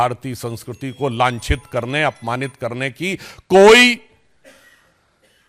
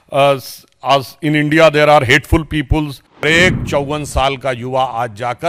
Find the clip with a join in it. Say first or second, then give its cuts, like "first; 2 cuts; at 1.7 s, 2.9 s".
second; 1 cut; at 3.2 s